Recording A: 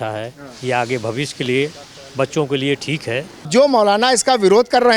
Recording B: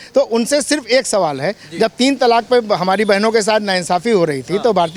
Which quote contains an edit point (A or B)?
A